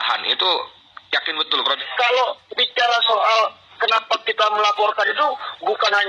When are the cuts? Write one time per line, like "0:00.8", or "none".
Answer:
0:01.8